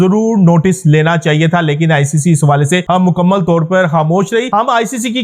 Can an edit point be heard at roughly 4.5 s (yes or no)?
yes